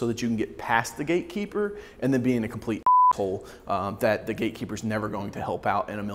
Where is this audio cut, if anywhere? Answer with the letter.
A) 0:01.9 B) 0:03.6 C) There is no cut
C